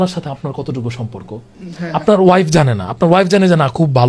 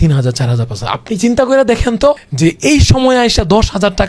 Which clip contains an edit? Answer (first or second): second